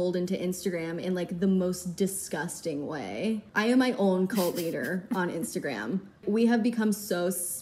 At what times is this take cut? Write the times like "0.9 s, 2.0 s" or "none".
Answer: 3.5 s, 6.2 s